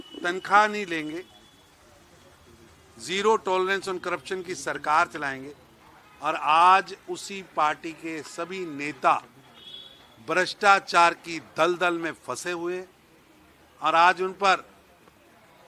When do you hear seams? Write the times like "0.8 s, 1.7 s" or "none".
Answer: none